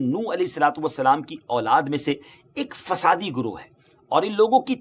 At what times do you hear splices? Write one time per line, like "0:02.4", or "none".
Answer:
none